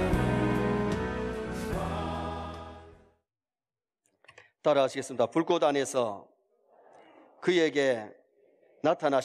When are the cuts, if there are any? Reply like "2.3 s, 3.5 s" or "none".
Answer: none